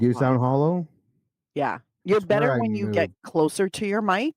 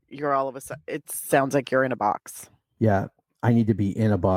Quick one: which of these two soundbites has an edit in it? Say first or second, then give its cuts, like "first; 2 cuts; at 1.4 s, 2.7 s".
first; 1 cut; at 1.9 s